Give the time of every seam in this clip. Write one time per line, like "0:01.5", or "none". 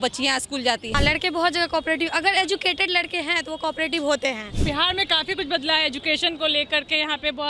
0:00.9
0:04.5